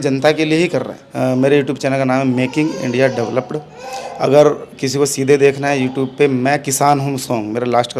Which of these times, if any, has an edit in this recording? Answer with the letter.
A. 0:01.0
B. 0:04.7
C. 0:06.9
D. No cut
A